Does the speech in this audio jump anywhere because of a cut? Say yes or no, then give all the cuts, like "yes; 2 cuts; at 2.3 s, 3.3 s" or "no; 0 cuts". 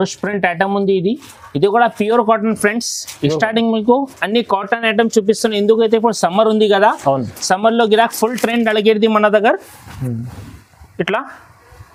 no; 0 cuts